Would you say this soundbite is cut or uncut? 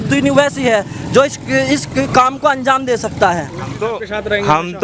cut